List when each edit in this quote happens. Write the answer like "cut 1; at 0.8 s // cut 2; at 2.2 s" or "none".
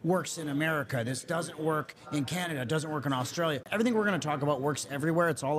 cut 1; at 3.6 s